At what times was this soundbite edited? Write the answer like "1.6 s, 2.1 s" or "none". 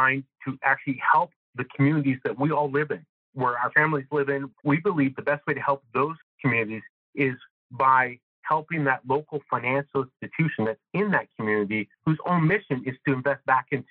4.5 s